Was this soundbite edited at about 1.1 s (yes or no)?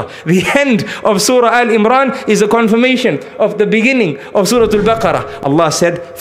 no